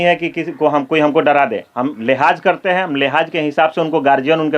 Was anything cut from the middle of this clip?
no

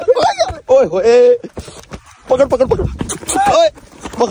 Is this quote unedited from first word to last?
yes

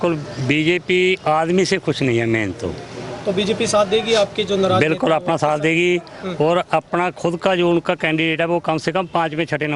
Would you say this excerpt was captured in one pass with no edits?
yes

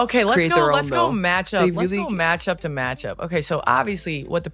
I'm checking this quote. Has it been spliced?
no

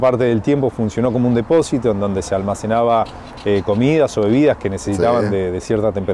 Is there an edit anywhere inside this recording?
no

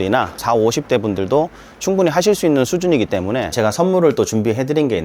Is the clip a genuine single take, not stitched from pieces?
no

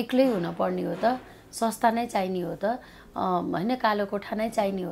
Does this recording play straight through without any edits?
yes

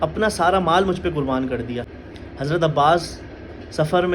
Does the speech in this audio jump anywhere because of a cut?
yes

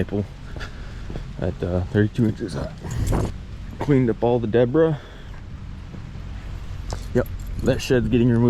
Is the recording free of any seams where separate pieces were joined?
no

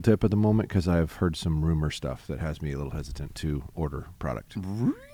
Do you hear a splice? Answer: no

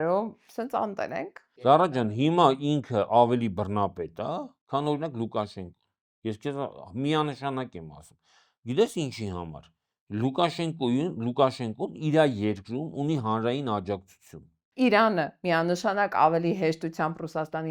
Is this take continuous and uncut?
no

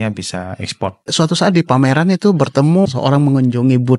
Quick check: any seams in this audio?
yes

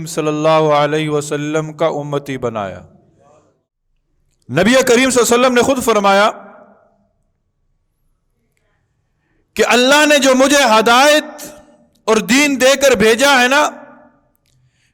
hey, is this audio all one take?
no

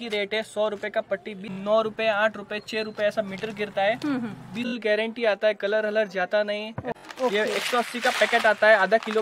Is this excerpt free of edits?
no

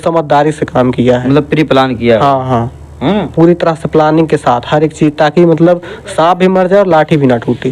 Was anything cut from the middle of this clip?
no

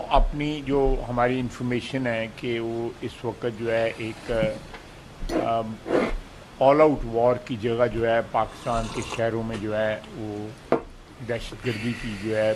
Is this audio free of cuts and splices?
yes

